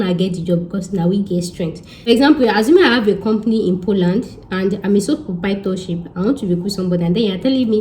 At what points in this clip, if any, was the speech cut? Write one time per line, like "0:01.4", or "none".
0:01.9